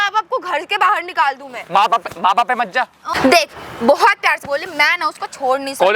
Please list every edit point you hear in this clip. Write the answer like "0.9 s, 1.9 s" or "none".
3.1 s